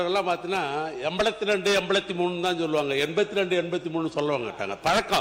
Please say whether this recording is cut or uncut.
uncut